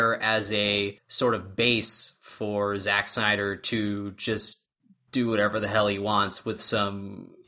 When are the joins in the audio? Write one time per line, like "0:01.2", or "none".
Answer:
0:01.0